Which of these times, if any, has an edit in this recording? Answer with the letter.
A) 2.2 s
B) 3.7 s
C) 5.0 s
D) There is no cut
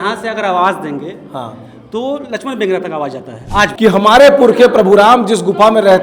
B